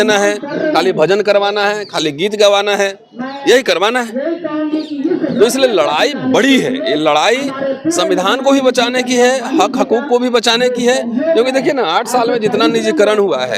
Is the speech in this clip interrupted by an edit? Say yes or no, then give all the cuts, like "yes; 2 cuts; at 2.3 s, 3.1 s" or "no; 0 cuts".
no; 0 cuts